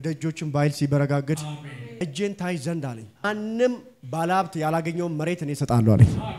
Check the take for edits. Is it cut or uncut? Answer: cut